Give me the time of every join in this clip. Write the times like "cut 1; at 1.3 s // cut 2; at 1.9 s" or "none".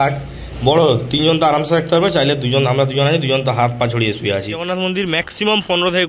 cut 1; at 4.6 s